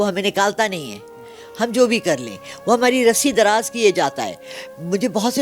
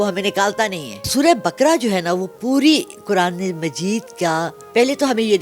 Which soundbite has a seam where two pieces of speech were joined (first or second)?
second